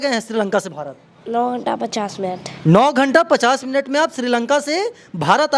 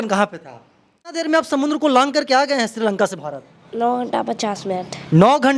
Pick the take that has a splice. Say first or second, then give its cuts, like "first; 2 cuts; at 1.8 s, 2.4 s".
second; 1 cut; at 1.2 s